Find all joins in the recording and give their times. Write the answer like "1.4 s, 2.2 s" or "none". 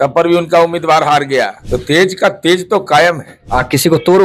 1.6 s, 3.3 s